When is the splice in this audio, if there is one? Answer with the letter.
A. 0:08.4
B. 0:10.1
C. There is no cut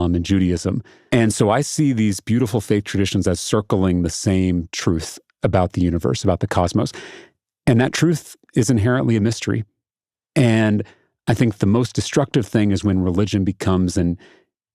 B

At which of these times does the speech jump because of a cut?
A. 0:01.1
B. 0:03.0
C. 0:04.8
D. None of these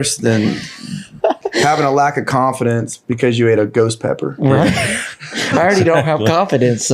B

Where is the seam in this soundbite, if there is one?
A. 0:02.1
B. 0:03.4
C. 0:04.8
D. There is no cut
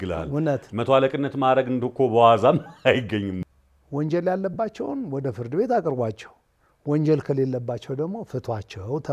B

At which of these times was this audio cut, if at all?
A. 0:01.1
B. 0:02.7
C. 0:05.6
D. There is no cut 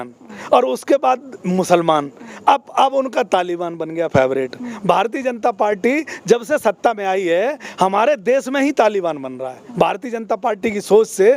D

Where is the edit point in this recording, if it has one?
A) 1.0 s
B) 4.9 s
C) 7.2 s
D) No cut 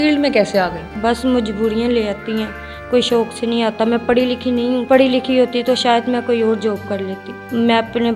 D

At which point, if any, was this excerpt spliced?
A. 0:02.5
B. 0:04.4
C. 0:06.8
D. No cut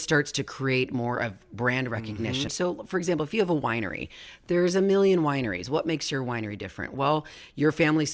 A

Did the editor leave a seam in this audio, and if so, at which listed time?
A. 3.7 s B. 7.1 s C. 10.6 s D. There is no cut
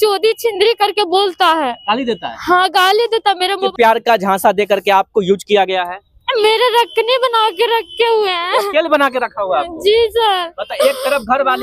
A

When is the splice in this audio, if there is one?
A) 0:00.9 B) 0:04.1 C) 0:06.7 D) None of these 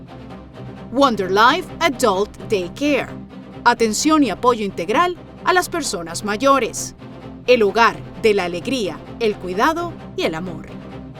A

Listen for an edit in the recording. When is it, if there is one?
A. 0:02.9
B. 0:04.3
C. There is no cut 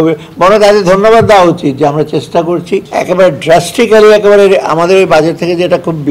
A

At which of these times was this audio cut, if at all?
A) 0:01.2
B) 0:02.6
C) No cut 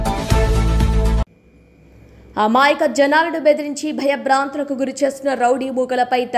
A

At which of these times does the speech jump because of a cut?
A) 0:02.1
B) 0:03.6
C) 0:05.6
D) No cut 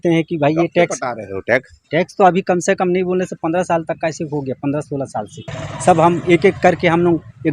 C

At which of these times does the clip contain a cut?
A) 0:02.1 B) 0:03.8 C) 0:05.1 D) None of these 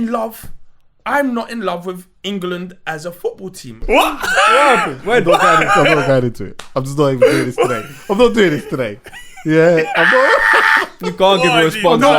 B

